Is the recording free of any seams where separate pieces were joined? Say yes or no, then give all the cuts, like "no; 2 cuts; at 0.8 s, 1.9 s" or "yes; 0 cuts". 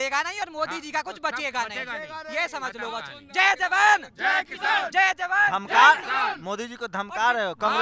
yes; 0 cuts